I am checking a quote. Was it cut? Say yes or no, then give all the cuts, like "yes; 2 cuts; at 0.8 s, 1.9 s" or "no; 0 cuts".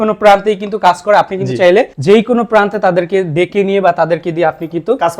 no; 0 cuts